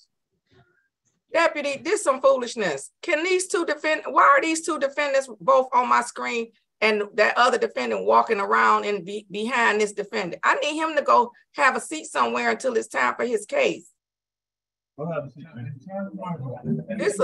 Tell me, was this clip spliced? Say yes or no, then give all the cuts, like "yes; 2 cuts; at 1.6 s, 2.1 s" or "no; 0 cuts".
no; 0 cuts